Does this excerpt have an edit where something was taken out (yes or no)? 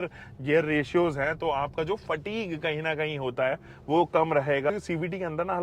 yes